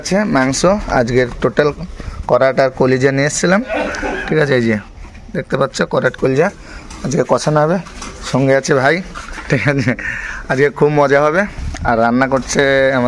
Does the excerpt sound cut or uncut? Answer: uncut